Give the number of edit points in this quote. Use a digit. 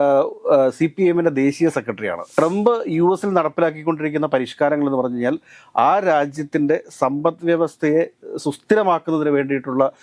1